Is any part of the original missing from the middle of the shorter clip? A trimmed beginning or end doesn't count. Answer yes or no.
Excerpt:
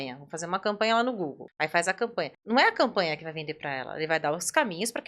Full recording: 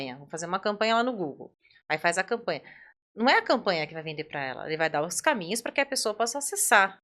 yes